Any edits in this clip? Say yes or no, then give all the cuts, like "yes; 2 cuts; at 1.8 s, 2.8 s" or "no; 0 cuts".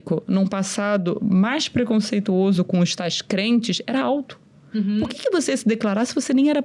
no; 0 cuts